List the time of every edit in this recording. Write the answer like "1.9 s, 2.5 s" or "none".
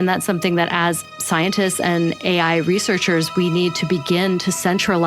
1.1 s